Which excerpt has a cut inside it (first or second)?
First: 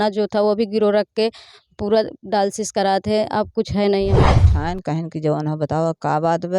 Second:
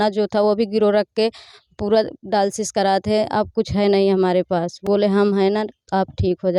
first